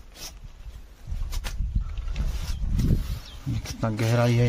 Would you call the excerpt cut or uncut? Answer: uncut